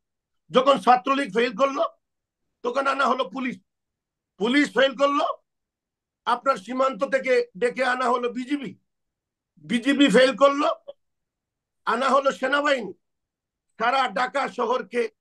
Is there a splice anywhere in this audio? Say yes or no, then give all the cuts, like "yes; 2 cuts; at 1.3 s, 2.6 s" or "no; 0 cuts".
no; 0 cuts